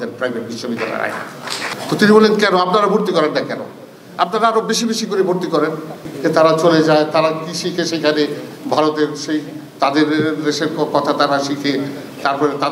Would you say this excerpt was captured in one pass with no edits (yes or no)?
no